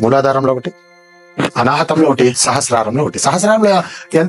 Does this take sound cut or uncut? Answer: uncut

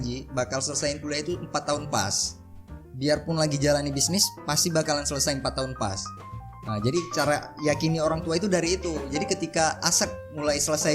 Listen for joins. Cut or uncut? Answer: uncut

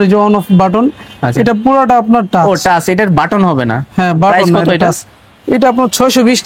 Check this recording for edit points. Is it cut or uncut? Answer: uncut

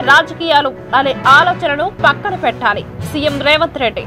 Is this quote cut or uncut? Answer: uncut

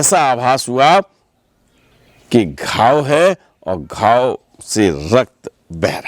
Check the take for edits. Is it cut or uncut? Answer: uncut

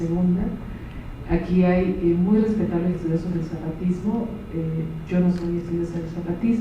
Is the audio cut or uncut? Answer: uncut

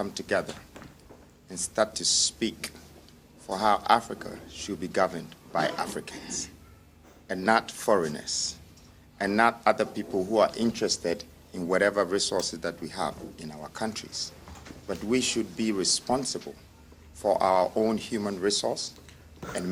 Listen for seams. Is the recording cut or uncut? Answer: uncut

